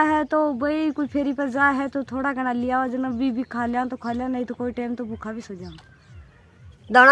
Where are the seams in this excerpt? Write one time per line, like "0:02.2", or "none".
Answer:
none